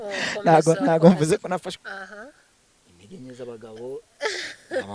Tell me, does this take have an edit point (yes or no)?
yes